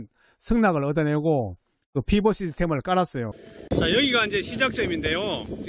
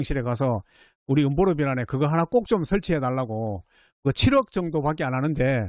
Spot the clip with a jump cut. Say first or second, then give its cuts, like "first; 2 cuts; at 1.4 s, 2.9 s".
first; 1 cut; at 3.3 s